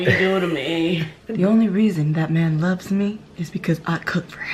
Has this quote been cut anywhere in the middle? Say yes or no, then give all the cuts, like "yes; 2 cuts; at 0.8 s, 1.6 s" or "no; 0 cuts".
yes; 1 cut; at 1.2 s